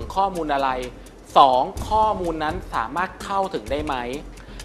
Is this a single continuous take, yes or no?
yes